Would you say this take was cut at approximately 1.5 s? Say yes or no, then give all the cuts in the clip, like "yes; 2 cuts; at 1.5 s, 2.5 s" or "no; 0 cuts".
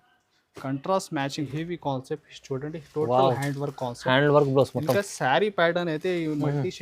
yes; 1 cut; at 1.5 s